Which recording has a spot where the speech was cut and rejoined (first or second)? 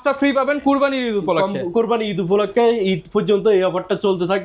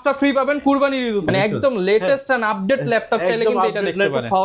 second